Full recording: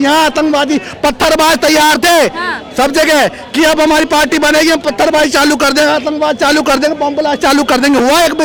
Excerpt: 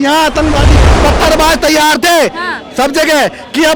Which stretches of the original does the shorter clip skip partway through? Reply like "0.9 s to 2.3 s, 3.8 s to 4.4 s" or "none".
none